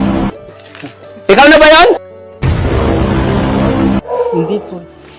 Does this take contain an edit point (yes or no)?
no